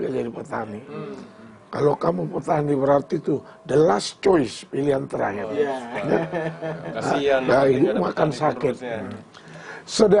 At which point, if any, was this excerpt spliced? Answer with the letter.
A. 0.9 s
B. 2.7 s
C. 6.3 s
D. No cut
D